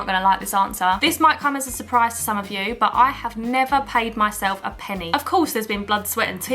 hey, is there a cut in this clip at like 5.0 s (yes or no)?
yes